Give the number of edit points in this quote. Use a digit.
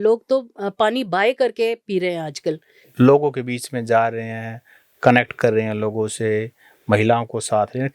1